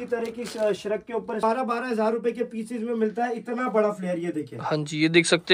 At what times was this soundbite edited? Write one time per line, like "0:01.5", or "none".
0:01.4

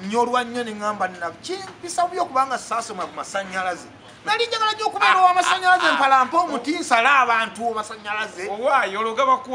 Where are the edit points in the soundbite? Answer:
none

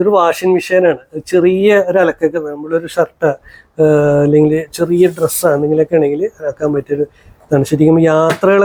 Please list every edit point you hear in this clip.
none

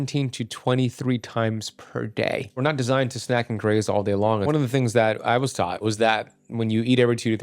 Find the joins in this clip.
0:02.6
0:04.5
0:05.8

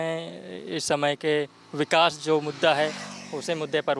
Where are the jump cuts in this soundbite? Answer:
none

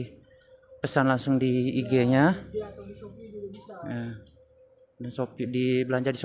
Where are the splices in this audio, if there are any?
none

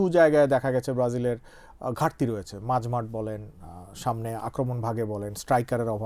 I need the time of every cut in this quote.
none

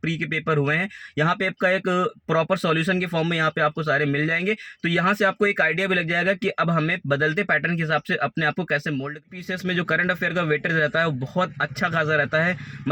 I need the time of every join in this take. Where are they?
0:09.2

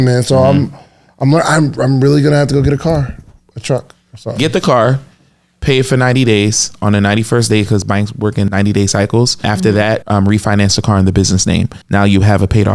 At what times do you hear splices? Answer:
0:08.5
0:09.8
0:11.8

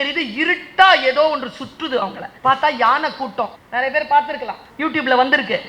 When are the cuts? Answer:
0:02.2
0:03.6
0:04.6

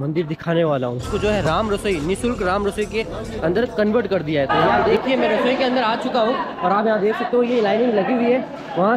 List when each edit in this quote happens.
0:01.1
0:04.8

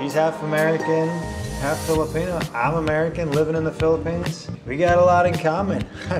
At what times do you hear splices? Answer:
0:04.5

